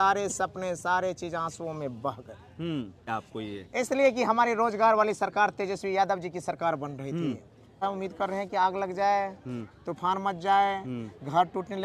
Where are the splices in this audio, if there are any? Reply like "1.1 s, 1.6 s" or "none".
3.1 s, 7.8 s

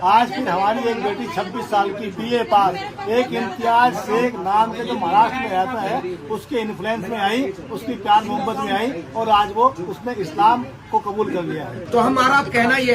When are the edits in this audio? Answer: 11.7 s

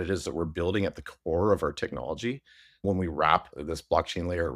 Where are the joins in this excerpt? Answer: 2.8 s, 3.5 s

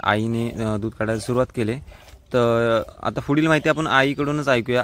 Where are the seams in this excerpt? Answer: none

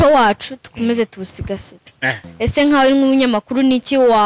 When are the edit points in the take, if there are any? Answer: 2.2 s

